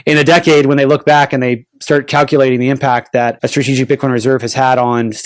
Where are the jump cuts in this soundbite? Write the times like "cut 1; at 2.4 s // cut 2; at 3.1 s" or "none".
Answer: cut 1; at 3.4 s